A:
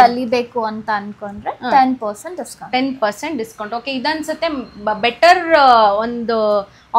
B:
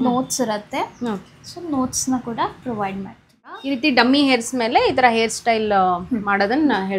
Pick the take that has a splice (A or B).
B